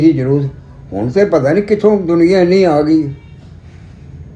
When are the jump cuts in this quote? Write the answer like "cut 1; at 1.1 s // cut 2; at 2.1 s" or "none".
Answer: none